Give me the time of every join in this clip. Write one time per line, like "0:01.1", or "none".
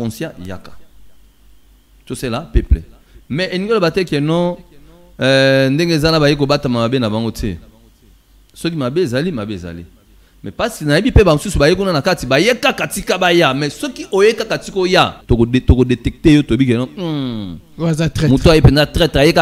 0:15.2